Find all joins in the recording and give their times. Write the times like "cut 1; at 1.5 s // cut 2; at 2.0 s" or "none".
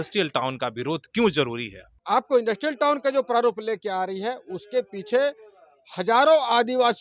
cut 1; at 1.9 s

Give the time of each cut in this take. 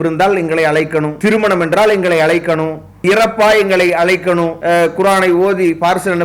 cut 1; at 1.1 s // cut 2; at 3.0 s // cut 3; at 4.6 s

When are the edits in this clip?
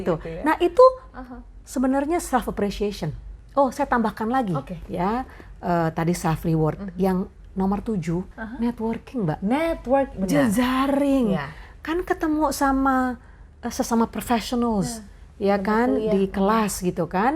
cut 1; at 3.3 s // cut 2; at 8.3 s

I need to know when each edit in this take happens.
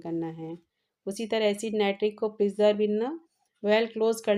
none

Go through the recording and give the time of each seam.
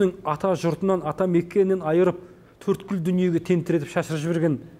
none

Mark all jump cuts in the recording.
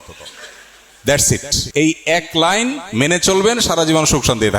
cut 1; at 1.6 s

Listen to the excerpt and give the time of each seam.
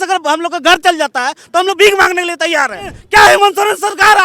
cut 1; at 3.0 s

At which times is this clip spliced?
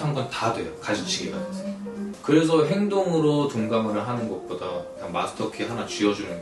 none

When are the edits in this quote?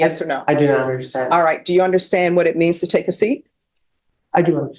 none

